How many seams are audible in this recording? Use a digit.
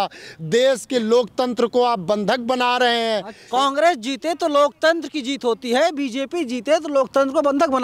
1